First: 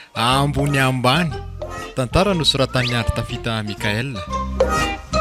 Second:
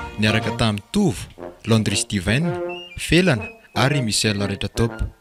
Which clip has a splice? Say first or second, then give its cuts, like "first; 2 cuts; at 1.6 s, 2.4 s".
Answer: first; 1 cut; at 4.2 s